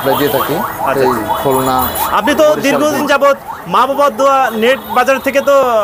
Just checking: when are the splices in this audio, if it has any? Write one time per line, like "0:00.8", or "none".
0:03.0